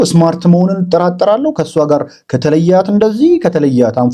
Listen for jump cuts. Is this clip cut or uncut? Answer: uncut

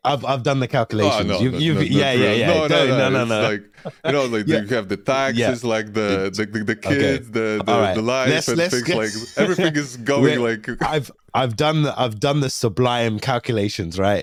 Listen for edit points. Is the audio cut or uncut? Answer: uncut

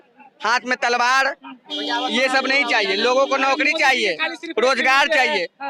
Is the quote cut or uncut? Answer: uncut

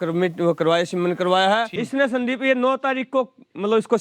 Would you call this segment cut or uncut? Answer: cut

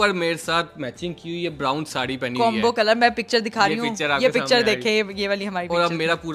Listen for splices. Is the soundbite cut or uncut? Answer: uncut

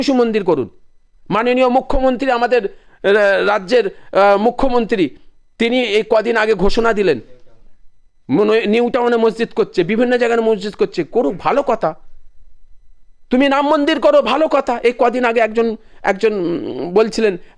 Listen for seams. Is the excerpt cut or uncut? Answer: uncut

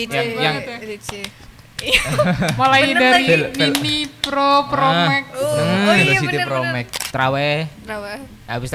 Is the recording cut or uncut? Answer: cut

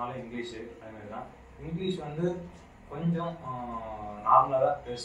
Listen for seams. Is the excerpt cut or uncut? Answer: uncut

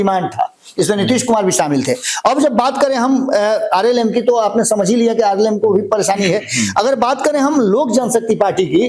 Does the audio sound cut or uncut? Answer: uncut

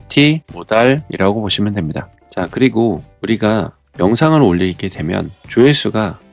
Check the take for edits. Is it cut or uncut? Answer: cut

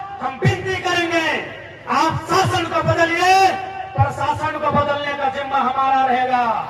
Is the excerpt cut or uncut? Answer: uncut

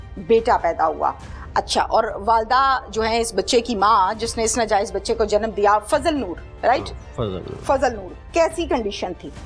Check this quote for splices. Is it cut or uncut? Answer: uncut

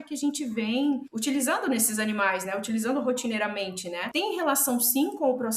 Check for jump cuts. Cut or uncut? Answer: cut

